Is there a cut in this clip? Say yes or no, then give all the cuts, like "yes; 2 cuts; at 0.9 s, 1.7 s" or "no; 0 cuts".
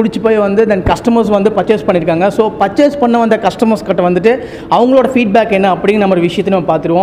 no; 0 cuts